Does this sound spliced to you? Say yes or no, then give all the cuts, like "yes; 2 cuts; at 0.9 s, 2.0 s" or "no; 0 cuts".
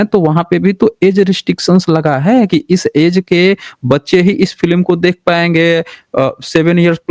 no; 0 cuts